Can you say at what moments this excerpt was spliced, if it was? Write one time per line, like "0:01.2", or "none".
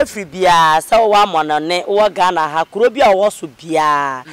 none